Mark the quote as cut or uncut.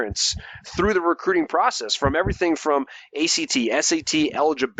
uncut